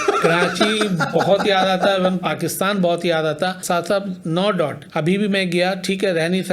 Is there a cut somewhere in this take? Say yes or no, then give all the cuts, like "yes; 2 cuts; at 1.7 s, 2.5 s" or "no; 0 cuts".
yes; 2 cuts; at 3.6 s, 4.8 s